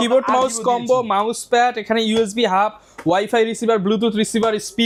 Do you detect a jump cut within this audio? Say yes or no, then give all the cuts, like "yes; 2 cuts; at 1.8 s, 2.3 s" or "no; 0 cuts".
no; 0 cuts